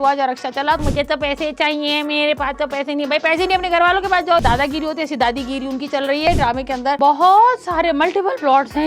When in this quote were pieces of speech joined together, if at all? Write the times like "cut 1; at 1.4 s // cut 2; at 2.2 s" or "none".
cut 1; at 0.8 s // cut 2; at 4.4 s // cut 3; at 6.3 s